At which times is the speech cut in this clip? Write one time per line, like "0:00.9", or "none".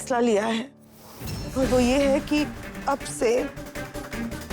0:01.4